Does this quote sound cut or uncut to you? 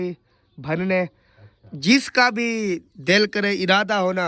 uncut